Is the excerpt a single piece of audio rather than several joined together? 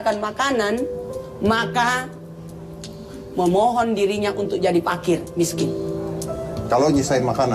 yes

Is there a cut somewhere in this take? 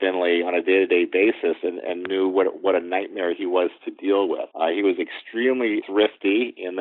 yes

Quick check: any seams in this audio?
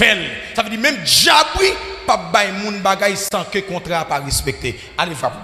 no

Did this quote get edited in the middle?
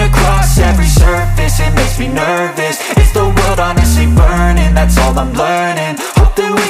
no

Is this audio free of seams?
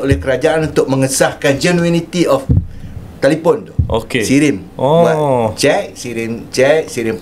yes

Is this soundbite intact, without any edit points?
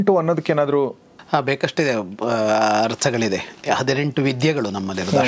yes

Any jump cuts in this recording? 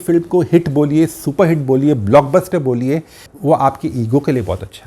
yes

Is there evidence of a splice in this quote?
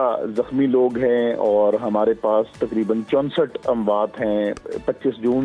no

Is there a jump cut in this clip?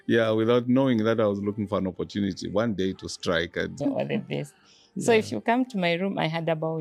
yes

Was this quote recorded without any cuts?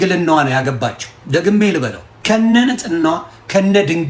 no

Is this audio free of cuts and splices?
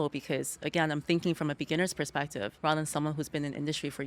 no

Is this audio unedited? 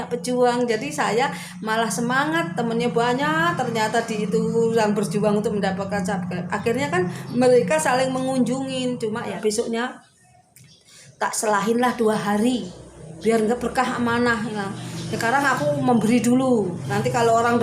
no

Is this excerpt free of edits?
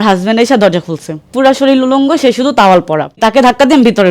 no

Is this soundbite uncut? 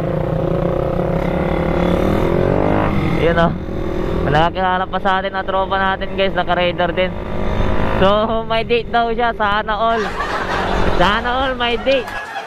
no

